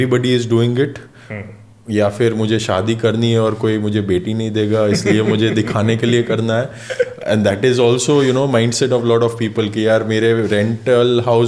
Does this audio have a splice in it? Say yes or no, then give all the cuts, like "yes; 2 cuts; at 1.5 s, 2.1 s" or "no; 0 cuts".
no; 0 cuts